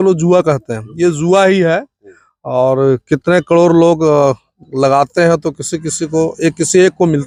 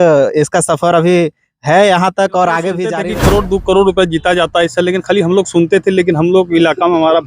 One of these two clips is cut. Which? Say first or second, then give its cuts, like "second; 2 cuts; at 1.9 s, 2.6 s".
second; 1 cut; at 3.0 s